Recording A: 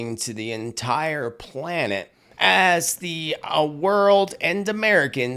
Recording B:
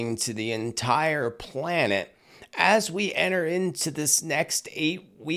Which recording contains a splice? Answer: A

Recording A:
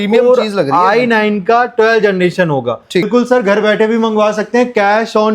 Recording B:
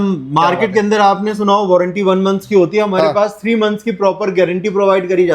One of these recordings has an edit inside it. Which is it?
A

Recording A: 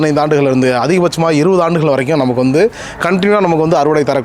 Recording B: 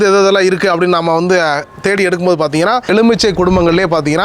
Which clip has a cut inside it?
B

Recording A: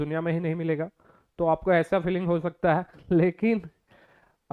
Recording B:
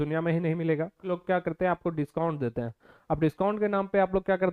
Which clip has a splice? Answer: B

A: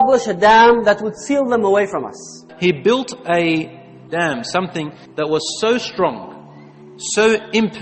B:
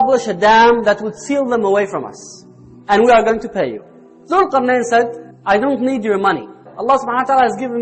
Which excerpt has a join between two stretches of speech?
A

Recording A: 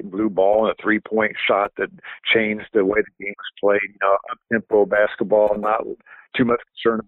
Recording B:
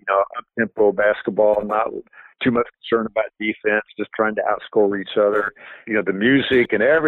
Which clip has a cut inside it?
B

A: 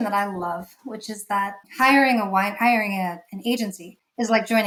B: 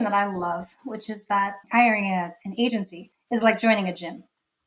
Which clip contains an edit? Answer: B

